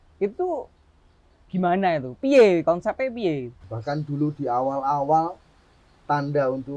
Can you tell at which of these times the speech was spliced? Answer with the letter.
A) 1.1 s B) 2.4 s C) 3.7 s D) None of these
C